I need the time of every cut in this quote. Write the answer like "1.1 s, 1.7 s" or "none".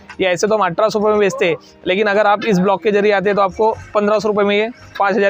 none